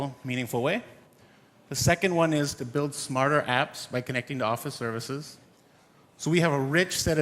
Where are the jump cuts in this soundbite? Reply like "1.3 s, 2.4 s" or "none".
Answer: 1.7 s